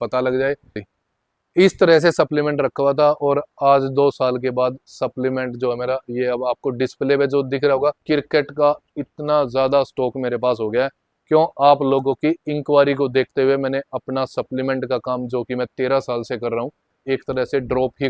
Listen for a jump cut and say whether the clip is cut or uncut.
cut